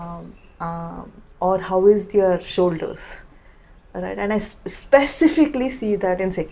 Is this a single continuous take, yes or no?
yes